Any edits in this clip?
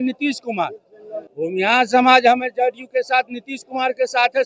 yes; 1 cut; at 1.2 s

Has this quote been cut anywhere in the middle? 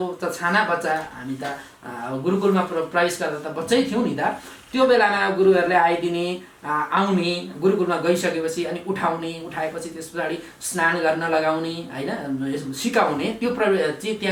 no; 0 cuts

